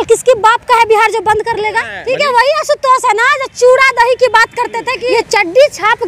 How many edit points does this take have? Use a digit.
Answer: 2